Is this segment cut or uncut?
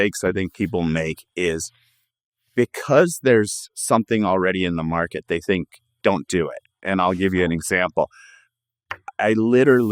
uncut